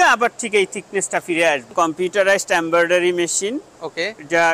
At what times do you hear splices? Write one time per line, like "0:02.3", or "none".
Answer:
0:01.7